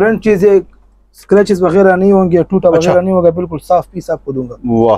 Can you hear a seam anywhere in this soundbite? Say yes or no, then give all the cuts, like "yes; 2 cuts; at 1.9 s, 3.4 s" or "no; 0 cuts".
no; 0 cuts